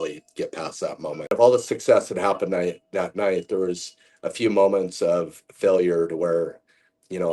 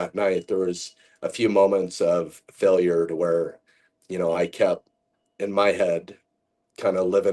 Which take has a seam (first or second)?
first